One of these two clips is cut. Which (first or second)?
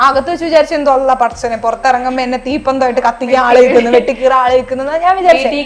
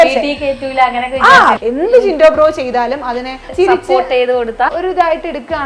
second